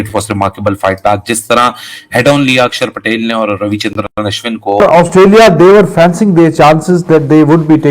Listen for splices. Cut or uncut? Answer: cut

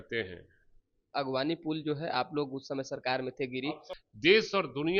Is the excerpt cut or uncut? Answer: cut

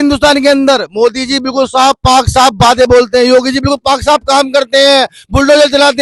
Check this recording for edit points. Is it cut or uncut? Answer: uncut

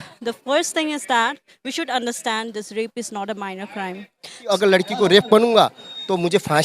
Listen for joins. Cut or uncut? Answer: cut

